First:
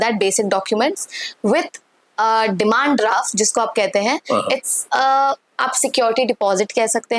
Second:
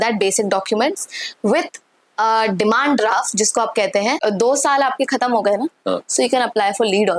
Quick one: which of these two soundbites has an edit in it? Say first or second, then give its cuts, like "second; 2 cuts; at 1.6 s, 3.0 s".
second; 1 cut; at 4.2 s